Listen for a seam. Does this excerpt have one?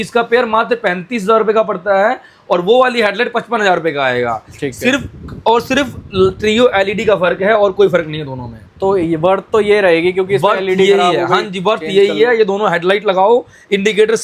no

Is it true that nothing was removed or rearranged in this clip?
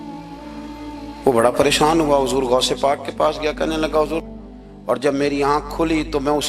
no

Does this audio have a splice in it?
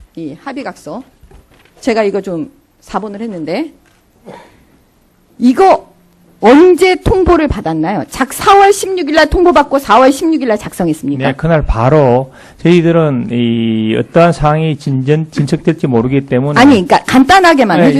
no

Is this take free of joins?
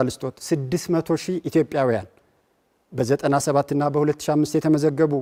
yes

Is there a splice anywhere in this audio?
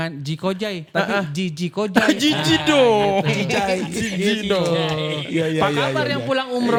no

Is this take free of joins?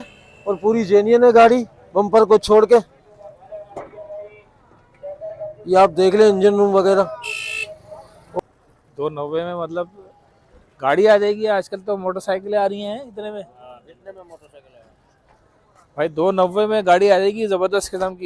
no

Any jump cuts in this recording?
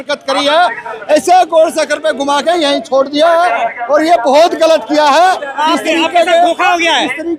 no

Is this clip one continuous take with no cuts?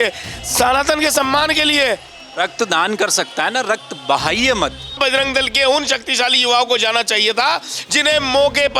no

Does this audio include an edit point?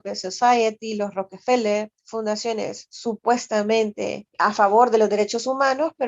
yes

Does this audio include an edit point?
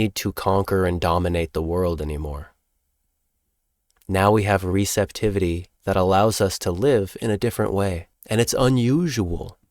yes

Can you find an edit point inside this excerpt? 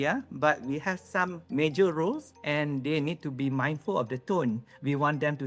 yes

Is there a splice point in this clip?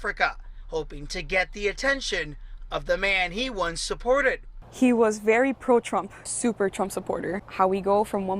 yes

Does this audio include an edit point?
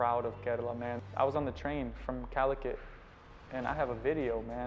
yes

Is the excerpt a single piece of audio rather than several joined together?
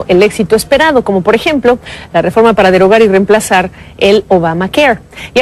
yes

